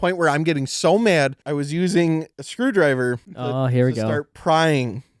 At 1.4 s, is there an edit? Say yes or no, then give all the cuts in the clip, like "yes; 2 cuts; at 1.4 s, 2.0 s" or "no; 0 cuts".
yes; 3 cuts; at 1.4 s, 2.4 s, 3.3 s